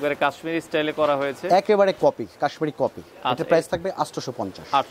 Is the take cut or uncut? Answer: uncut